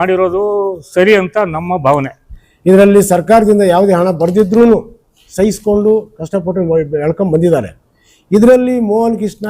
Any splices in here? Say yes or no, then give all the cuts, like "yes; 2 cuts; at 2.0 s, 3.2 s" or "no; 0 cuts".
yes; 1 cut; at 2.0 s